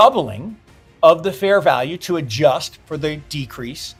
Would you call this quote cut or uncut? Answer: uncut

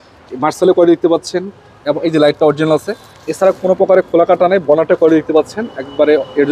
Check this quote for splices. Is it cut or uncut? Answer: uncut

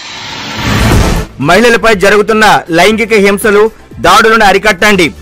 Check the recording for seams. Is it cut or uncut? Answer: cut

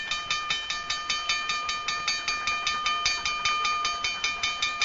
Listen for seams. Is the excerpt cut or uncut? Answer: uncut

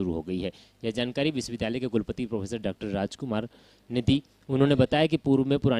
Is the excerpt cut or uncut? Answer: cut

